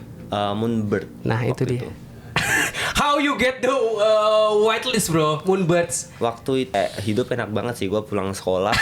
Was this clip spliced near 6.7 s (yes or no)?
yes